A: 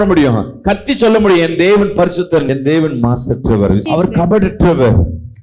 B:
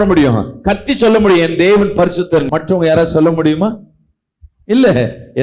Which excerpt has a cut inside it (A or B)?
A